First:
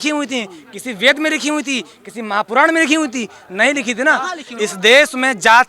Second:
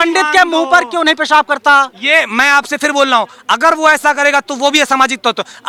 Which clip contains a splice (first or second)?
first